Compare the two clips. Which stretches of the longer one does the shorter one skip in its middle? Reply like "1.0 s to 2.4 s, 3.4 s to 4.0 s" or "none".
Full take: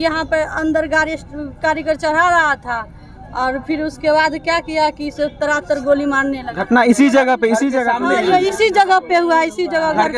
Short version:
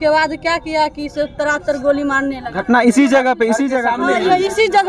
none